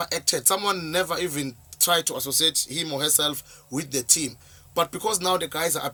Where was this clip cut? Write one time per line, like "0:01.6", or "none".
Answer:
none

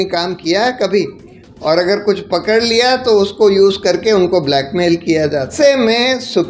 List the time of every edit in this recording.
0:05.5

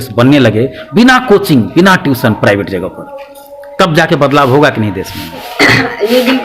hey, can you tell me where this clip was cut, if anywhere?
0:05.5

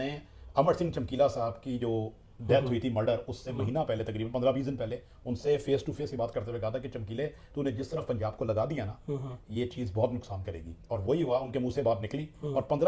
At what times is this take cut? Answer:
none

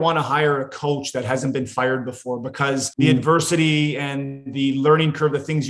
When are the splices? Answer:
0:02.9

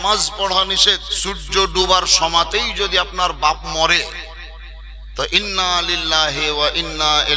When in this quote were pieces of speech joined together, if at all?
0:01.1

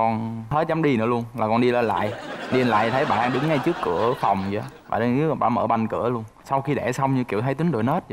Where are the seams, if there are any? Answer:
0:06.4

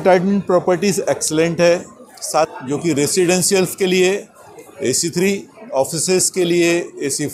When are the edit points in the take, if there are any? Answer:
0:02.5

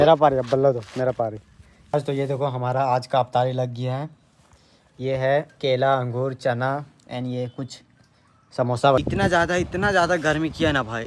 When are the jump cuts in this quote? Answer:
0:01.9
0:09.0

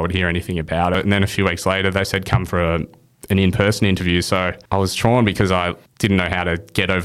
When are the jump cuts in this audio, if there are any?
0:01.0
0:04.6
0:05.8

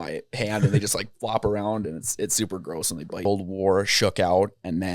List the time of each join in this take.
0:03.2

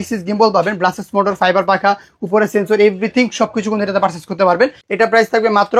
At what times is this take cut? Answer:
0:04.8

